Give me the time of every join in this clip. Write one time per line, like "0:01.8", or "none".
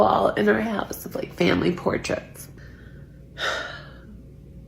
0:02.6